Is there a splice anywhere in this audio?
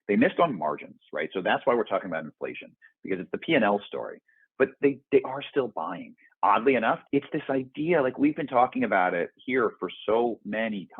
yes; 1 cut; at 7.0 s

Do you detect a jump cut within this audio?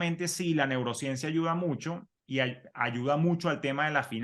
no; 0 cuts

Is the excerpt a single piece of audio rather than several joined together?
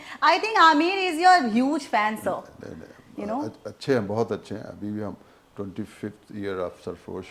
yes; 0 cuts

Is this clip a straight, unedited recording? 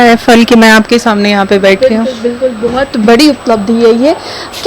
yes; 0 cuts

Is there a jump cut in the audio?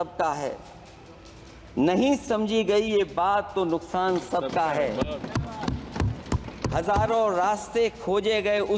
no; 0 cuts

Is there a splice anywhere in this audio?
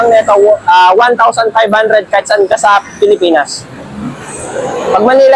no; 0 cuts

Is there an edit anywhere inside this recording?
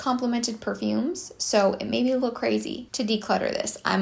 no; 0 cuts

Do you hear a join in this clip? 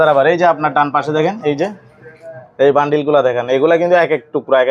no; 0 cuts

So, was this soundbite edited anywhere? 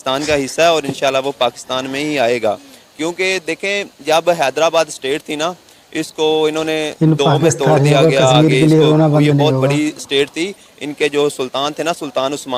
no; 0 cuts

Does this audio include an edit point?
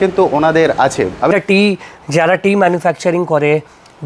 yes; 1 cut; at 1.3 s

